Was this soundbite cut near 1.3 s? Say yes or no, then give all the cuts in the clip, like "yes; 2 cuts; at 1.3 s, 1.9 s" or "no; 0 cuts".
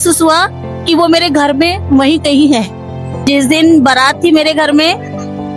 no; 1 cut; at 3.1 s